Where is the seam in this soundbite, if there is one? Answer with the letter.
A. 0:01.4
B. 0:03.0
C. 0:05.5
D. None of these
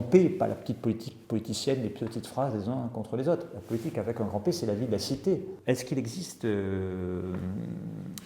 C